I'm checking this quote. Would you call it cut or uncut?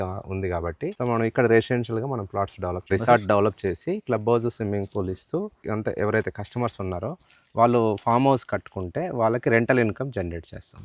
cut